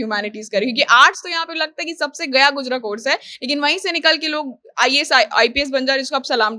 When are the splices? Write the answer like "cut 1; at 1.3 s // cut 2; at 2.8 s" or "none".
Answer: none